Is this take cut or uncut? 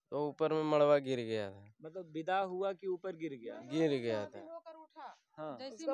uncut